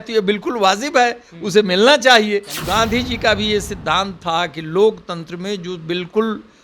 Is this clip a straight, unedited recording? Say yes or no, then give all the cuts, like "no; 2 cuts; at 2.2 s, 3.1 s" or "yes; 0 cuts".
no; 1 cut; at 2.6 s